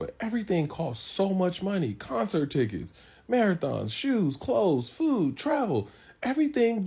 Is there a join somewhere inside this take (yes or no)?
no